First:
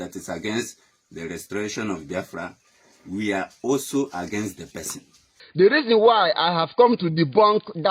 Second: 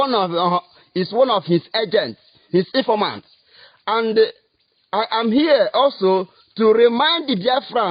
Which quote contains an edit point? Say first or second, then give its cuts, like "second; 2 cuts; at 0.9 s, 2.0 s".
first; 1 cut; at 5.4 s